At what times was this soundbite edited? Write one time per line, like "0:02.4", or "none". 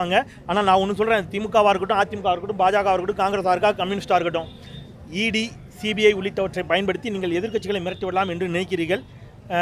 none